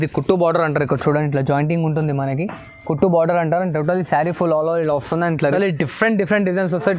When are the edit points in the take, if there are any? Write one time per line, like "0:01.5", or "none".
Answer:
0:05.5